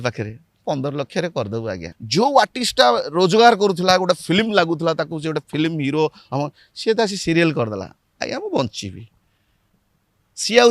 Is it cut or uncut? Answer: cut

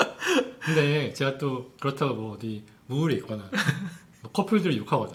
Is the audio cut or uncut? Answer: uncut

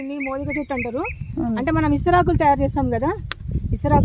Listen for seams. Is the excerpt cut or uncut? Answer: uncut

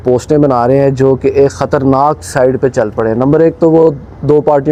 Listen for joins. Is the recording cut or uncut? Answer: uncut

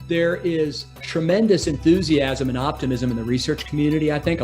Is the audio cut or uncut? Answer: cut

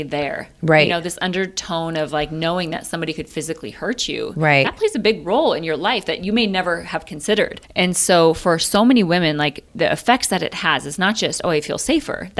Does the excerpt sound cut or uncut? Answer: cut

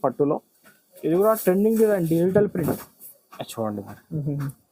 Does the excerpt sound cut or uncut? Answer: uncut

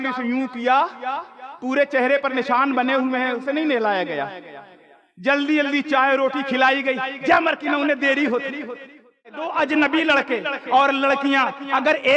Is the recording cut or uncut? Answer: cut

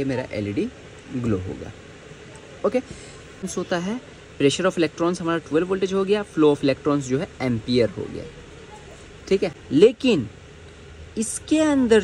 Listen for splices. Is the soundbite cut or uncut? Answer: cut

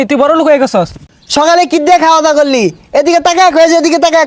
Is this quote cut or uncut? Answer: cut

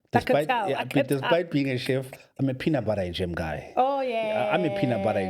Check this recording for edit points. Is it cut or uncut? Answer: uncut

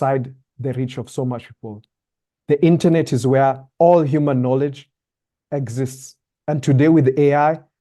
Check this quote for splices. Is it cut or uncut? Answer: uncut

